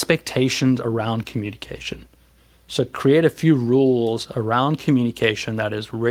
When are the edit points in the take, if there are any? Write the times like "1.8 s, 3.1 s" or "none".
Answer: none